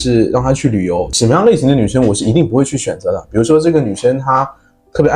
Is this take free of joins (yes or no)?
no